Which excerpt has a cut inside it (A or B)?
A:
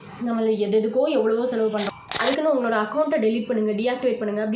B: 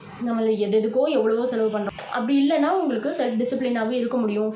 A